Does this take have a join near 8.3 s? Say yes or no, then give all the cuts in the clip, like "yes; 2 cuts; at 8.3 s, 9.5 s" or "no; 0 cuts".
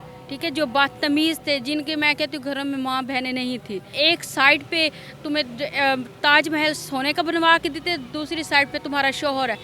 no; 1 cut; at 3.9 s